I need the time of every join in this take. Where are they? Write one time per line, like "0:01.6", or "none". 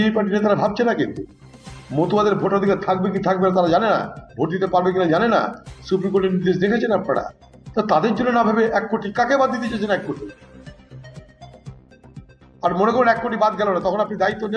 0:10.8
0:12.6